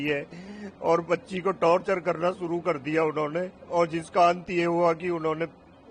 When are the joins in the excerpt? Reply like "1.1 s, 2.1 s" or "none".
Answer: none